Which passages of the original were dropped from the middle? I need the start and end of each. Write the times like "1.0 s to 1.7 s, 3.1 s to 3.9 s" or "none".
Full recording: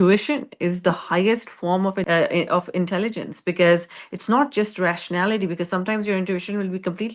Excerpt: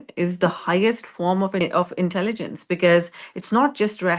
2.0 s to 2.4 s